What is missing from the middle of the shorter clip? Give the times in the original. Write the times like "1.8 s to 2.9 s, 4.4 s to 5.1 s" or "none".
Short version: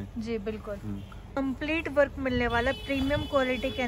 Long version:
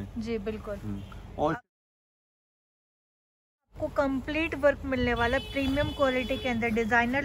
1.4 s to 4.0 s